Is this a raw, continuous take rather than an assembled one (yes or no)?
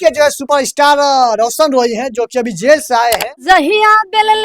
no